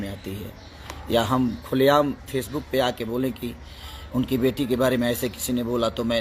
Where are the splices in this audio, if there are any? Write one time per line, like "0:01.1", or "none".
none